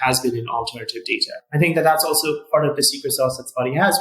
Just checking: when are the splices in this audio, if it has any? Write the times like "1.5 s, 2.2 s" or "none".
1.3 s

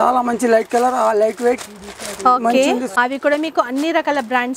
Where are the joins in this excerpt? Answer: 2.9 s

